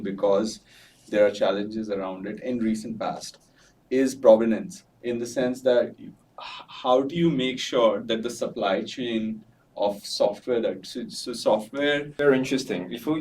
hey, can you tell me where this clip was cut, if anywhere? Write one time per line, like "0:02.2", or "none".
0:12.1

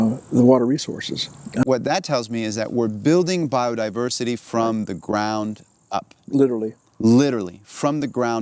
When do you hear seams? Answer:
0:01.7

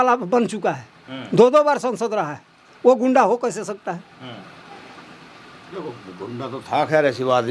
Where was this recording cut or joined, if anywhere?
none

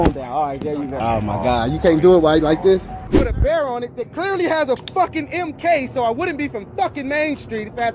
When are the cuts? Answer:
0:00.9
0:03.0

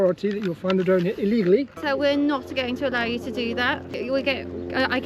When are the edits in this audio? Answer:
0:01.8
0:03.9

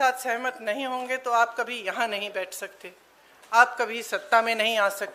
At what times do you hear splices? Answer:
none

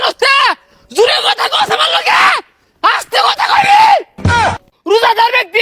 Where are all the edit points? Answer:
0:04.5

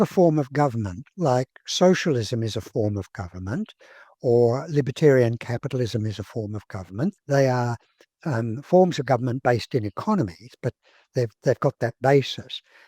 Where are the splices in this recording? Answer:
0:07.2

